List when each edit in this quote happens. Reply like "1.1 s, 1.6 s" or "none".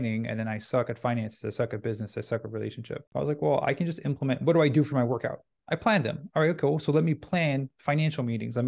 3.1 s